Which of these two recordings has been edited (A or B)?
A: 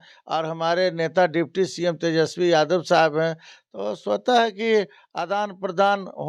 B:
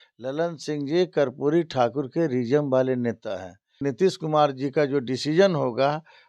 B